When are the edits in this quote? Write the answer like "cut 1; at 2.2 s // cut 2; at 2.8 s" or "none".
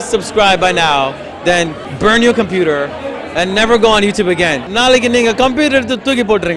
cut 1; at 1.8 s // cut 2; at 4.7 s